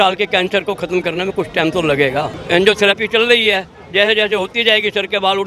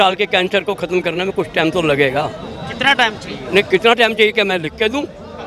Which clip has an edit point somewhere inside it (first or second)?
first